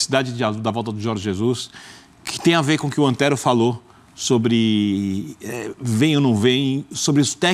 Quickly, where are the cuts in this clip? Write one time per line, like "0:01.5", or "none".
none